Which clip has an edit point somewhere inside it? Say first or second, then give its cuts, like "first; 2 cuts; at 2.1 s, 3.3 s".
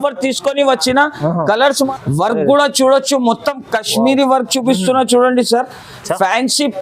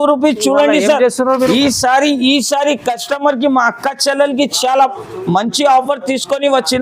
first; 1 cut; at 1.9 s